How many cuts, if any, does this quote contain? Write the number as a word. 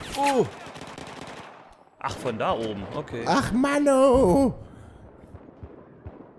two